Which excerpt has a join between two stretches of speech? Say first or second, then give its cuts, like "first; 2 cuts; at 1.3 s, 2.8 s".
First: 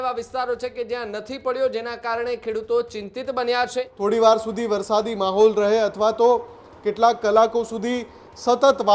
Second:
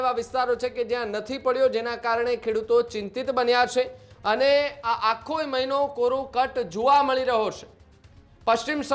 first; 1 cut; at 3.9 s